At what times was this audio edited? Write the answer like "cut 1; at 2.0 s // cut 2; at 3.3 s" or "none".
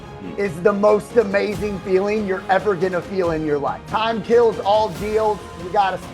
cut 1; at 3.8 s